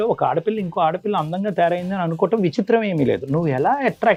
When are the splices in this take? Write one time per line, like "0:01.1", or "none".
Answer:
none

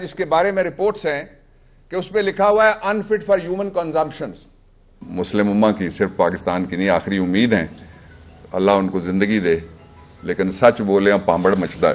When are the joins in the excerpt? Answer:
0:05.0

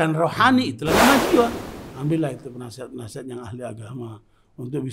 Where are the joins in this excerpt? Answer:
0:01.7

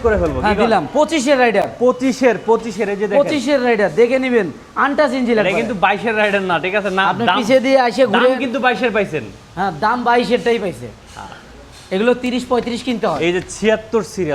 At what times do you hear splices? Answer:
none

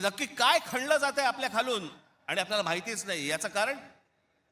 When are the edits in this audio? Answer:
none

